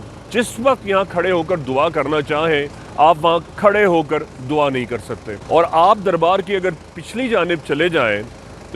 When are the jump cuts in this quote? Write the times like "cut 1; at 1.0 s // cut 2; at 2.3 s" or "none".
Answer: cut 1; at 5.3 s